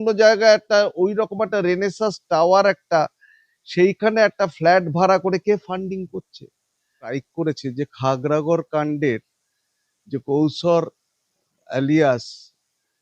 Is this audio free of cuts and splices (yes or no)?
no